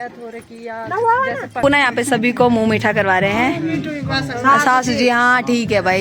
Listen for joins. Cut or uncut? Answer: cut